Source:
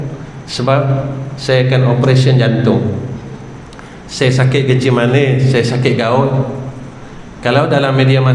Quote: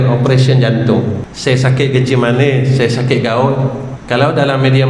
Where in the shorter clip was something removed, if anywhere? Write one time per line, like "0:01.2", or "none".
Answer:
0:01.3
0:03.9